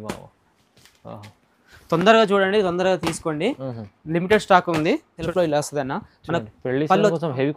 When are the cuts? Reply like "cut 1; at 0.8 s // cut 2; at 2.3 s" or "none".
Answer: cut 1; at 5.1 s